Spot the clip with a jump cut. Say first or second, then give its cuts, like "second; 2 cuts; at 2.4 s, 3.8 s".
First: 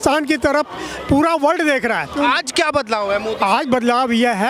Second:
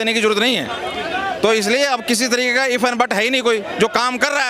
first; 1 cut; at 2.1 s